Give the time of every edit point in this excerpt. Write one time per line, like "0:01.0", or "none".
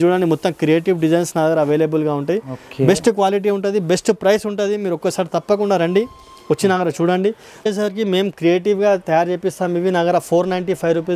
0:07.6